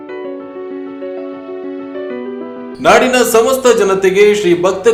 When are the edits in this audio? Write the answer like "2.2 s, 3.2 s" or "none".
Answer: none